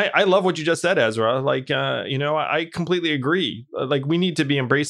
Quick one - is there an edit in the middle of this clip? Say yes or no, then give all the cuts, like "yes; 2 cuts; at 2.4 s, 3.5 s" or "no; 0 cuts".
no; 0 cuts